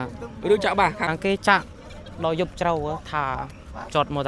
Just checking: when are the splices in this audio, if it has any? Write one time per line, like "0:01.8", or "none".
0:01.1